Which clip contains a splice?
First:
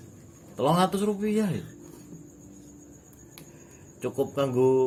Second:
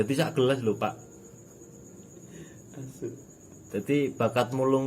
second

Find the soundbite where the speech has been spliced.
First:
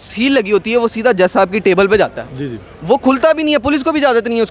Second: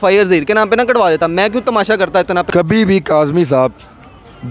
second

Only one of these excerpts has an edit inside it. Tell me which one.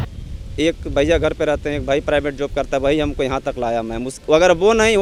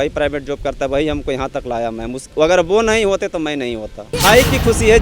second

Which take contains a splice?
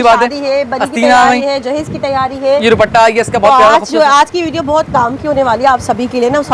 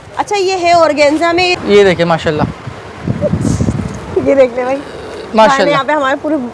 second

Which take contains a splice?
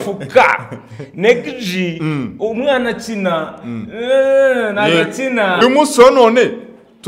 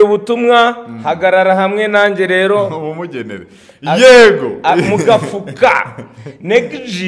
first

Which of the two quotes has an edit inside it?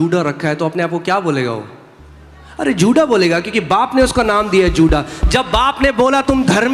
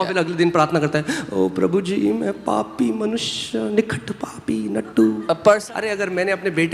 second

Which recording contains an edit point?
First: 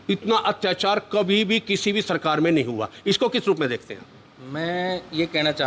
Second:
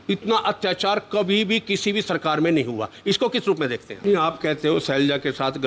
second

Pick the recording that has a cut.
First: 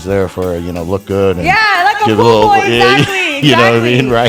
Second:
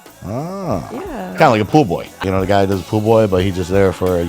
second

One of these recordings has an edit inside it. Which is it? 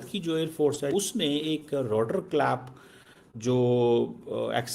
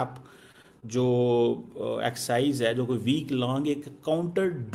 first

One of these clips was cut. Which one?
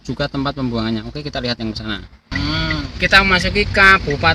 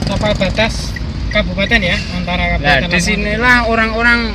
first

